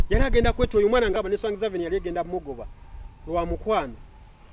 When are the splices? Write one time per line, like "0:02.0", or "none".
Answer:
0:01.1

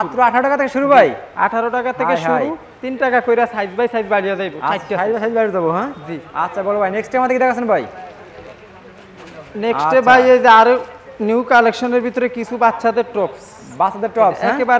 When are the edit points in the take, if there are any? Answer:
none

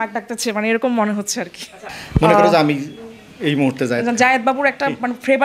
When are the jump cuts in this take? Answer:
none

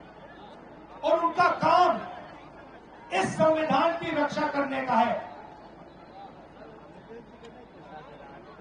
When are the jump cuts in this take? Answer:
none

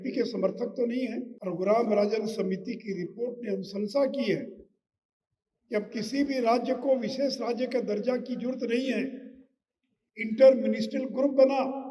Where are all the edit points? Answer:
0:01.3

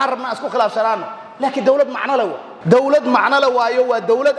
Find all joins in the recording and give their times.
0:02.5

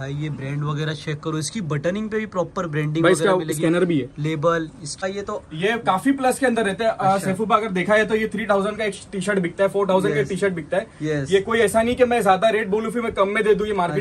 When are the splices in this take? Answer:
0:04.9

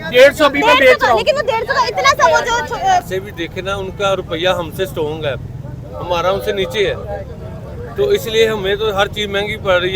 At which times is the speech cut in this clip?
0:03.1

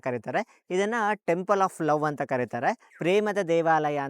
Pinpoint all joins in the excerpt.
0:02.9

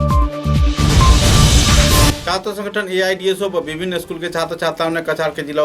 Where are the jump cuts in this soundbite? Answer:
0:02.2

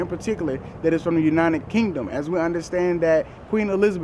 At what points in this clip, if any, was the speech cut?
none

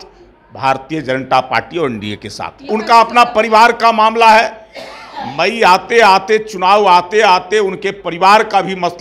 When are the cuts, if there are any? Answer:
0:02.7

